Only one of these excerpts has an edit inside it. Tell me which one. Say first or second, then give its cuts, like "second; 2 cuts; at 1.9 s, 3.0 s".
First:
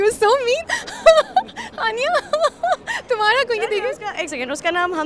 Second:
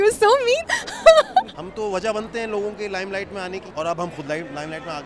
second; 2 cuts; at 1.6 s, 3.7 s